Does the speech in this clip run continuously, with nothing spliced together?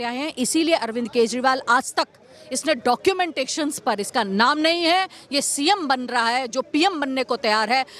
yes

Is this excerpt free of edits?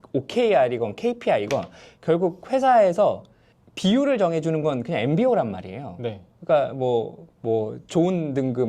no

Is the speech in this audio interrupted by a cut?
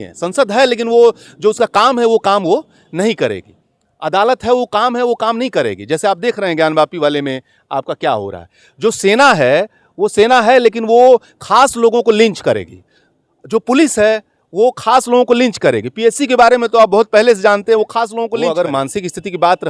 yes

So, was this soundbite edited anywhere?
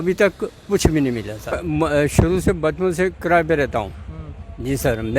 yes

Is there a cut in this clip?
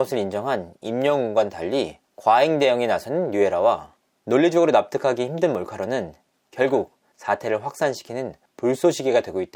no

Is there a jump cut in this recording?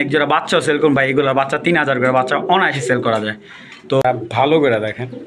yes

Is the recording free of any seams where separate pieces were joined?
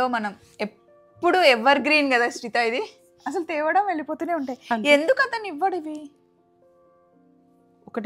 yes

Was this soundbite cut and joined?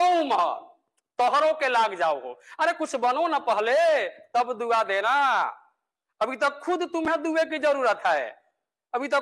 no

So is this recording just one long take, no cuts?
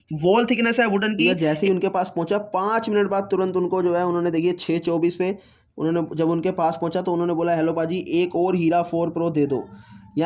no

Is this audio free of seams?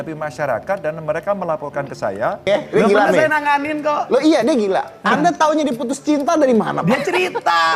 no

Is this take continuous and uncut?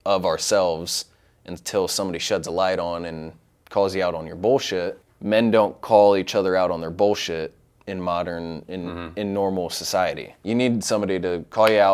no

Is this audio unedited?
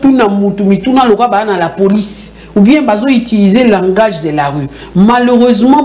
yes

